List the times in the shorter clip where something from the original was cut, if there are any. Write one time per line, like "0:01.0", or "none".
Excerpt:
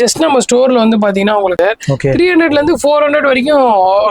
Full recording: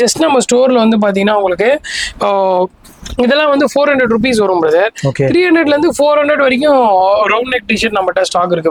0:01.6

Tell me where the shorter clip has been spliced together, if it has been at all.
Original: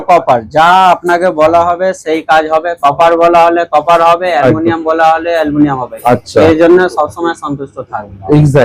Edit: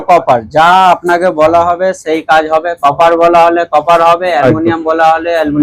none

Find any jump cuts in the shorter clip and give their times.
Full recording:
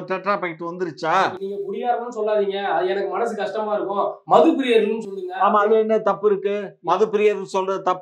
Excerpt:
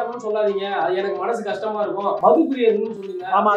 0:02.2

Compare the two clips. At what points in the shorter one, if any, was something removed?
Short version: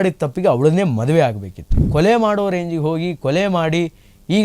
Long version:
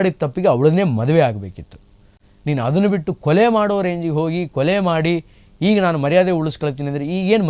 0:01.8

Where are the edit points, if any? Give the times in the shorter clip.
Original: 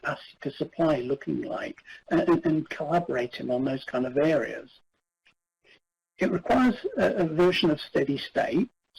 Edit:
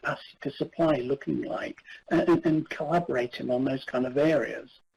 none

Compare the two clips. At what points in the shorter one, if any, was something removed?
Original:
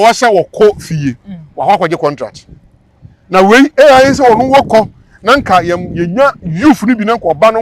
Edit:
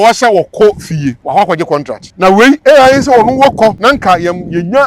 0:01.2
0:02.0
0:03.8

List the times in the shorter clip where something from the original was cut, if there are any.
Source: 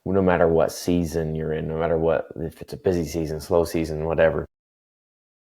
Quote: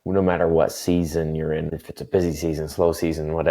0:01.7

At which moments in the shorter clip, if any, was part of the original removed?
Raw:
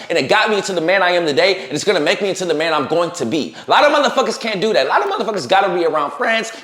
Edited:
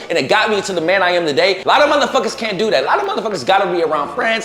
0:01.6

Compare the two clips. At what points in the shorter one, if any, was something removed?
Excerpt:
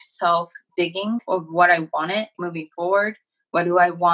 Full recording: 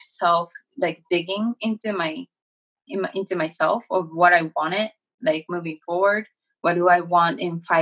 0:01.1
0:02.4

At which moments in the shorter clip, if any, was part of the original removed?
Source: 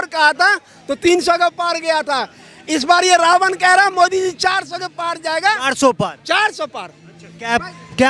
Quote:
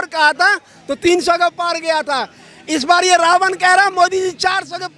none

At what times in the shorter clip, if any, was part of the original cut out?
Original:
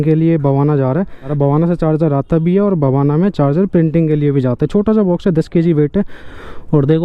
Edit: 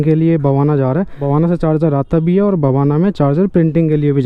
0:01.2

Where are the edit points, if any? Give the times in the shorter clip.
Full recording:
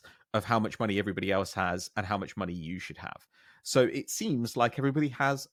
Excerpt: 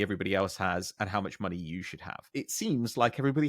0:02.3

